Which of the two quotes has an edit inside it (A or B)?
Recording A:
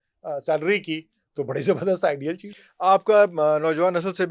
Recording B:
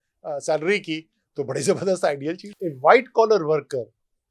B